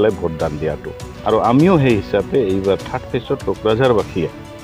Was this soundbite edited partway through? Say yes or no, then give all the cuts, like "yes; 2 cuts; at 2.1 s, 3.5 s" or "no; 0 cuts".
yes; 1 cut; at 1.1 s